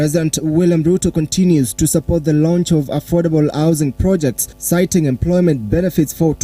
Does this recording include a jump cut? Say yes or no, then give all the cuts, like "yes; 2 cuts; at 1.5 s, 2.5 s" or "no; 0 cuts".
yes; 1 cut; at 4.5 s